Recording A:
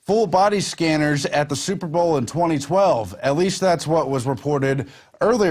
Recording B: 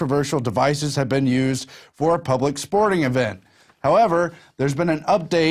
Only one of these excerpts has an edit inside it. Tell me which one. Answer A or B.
A